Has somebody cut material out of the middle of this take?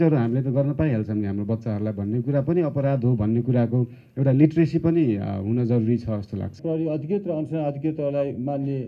yes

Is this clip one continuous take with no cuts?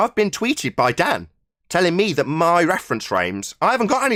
yes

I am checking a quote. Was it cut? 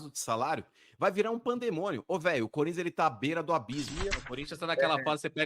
yes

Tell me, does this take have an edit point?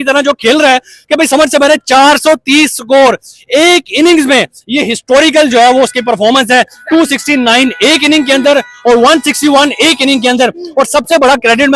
no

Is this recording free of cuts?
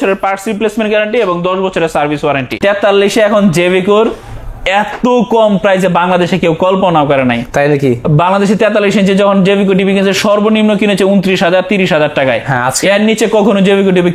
no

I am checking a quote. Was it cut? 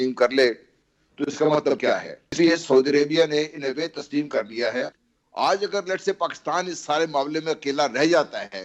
yes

